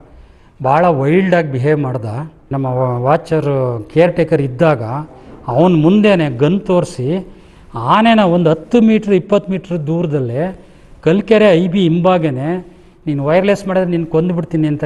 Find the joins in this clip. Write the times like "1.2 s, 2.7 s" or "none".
2.5 s